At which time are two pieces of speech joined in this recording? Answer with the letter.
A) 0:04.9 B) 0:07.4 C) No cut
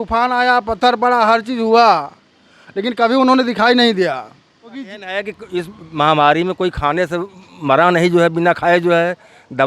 A